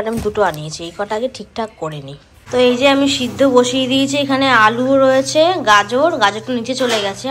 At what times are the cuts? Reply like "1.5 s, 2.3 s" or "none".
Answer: none

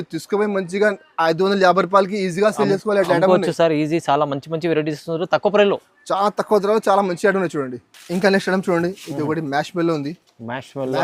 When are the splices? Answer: none

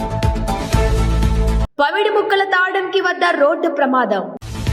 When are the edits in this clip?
none

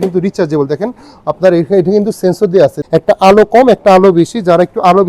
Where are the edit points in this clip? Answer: 2.8 s

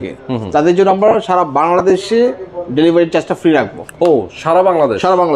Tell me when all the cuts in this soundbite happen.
none

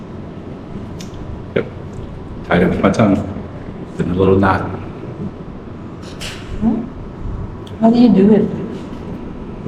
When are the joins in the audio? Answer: none

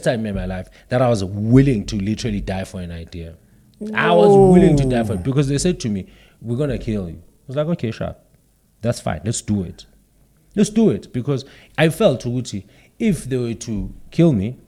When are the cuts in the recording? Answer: none

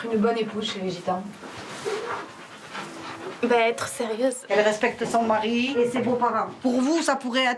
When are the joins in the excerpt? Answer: none

